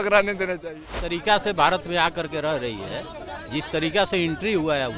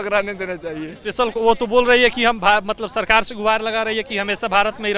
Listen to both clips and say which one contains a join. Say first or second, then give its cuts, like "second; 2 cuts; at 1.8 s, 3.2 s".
first; 1 cut; at 0.9 s